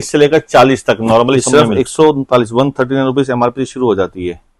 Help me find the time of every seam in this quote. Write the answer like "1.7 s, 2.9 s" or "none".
1.4 s